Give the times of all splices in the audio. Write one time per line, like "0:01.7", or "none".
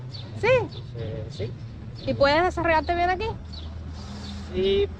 none